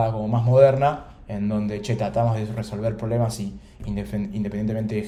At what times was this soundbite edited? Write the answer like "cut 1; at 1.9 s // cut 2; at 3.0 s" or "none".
none